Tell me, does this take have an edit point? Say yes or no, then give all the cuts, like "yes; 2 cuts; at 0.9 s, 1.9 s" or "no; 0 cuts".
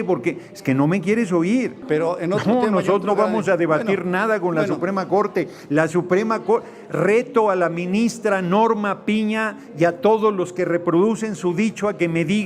yes; 1 cut; at 1.8 s